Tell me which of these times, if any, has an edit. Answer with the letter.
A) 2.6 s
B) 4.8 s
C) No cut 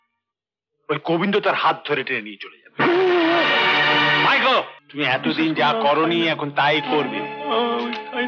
B